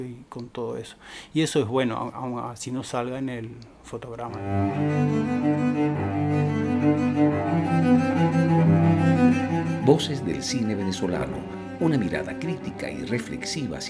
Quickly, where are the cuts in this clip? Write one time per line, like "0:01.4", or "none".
0:04.4